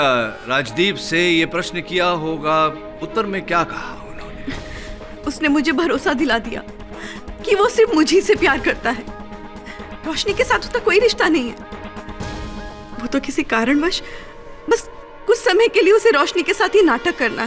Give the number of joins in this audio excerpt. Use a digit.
0